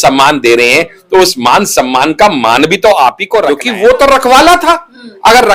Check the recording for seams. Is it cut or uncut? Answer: cut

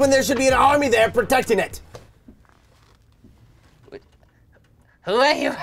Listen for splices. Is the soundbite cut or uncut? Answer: uncut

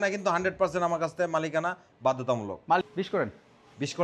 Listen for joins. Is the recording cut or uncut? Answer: cut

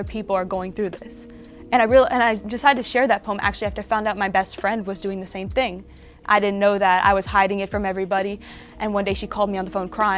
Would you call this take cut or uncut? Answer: uncut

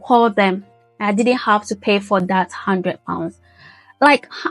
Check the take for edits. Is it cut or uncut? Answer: uncut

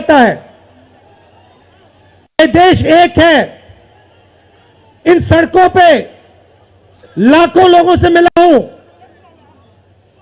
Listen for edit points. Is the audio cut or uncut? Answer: cut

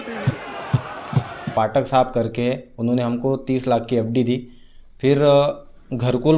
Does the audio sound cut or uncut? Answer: cut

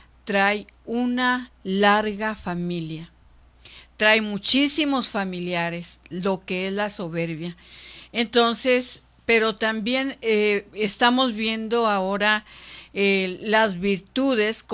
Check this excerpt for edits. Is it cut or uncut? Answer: uncut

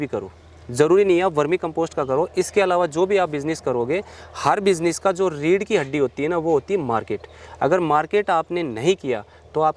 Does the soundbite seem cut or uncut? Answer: uncut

